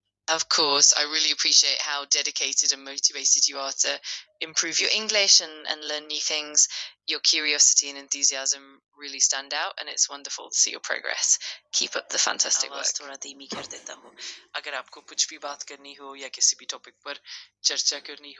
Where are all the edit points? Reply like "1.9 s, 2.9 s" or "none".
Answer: 12.7 s